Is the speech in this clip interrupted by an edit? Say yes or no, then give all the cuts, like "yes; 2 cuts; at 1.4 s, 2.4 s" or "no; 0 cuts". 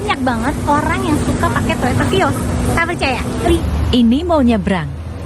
yes; 1 cut; at 3.6 s